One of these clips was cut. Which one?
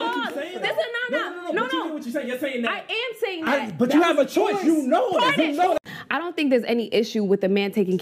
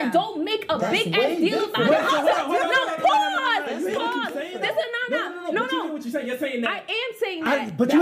first; 1 cut; at 5.8 s

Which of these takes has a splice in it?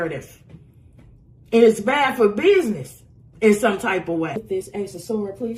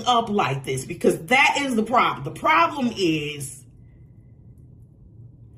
first; 1 cut; at 4.4 s

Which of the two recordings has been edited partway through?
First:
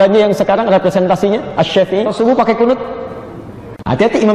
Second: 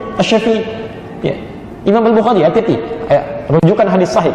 first; 1 cut; at 2.1 s

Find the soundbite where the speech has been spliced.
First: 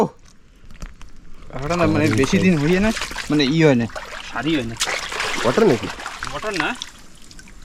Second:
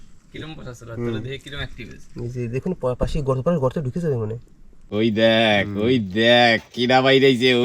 second; 1 cut; at 4.8 s

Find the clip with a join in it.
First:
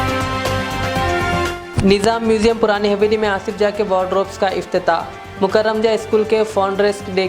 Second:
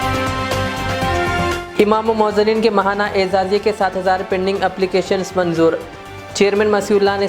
second; 1 cut; at 1.5 s

